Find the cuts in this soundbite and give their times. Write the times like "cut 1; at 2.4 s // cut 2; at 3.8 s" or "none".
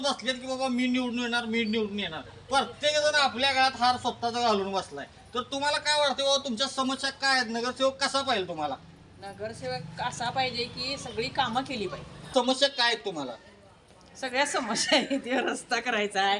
cut 1; at 12.3 s